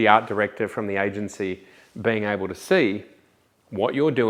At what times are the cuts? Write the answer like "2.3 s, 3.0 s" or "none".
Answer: none